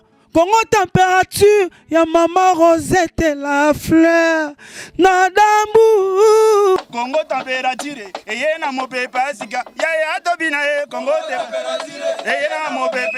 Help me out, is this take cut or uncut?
uncut